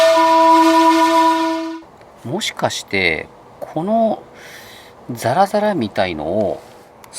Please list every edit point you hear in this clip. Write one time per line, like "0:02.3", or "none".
0:01.6

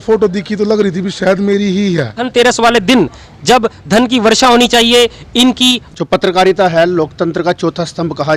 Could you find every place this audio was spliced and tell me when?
0:02.3
0:05.9

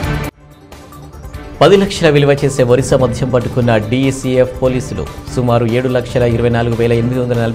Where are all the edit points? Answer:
none

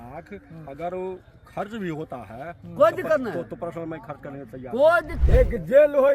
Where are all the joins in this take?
0:05.1

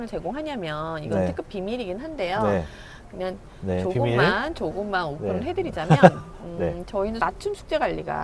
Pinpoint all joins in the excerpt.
0:07.2

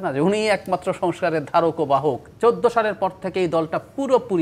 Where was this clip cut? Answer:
0:02.3

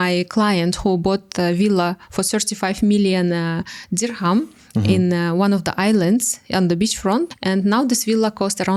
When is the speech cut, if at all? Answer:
none

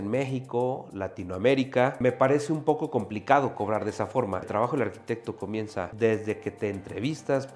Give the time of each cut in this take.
0:02.0
0:04.5
0:05.9

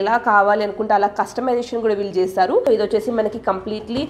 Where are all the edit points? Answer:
0:02.6

